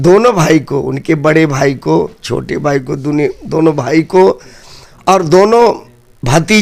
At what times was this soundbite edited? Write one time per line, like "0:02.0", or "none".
none